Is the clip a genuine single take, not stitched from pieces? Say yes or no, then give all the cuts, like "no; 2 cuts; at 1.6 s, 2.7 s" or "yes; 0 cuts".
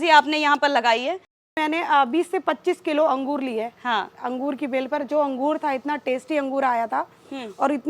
no; 1 cut; at 1.6 s